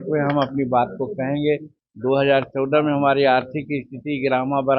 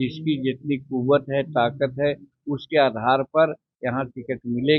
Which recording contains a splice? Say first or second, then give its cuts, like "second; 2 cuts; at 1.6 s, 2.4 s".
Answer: first; 1 cut; at 1.7 s